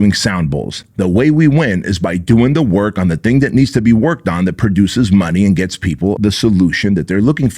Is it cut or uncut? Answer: cut